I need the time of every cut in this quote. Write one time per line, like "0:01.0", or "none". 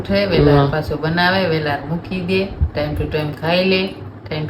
none